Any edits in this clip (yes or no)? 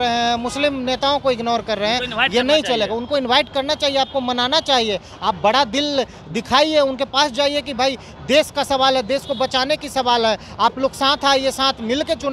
no